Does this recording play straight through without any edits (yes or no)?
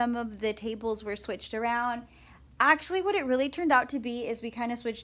yes